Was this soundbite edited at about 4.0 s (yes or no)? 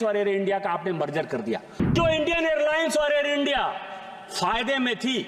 no